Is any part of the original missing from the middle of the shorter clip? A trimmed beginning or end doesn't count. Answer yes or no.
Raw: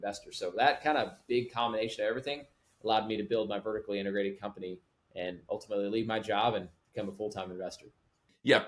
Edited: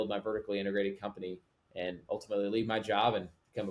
no